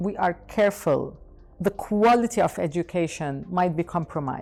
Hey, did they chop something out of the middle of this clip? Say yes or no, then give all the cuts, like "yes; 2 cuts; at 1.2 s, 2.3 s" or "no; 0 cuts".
no; 0 cuts